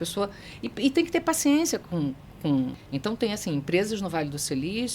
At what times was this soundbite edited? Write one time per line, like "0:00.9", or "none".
0:02.8